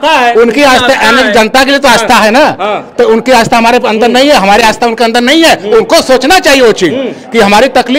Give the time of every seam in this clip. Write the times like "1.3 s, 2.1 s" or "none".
none